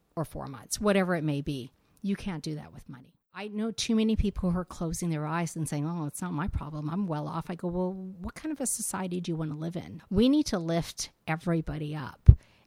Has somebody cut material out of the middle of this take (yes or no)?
yes